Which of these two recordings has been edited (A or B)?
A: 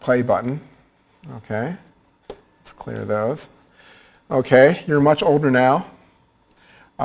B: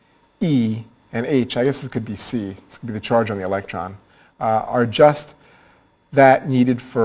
B